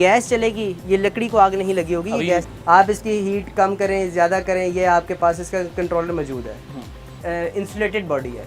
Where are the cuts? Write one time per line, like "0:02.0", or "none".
0:02.5
0:07.2